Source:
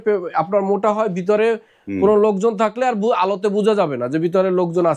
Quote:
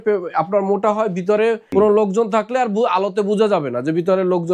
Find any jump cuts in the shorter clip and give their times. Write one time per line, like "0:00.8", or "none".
0:01.6